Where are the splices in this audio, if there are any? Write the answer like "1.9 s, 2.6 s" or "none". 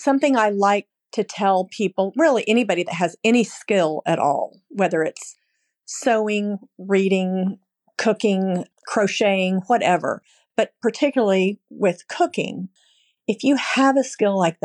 1.0 s, 8.7 s, 12.7 s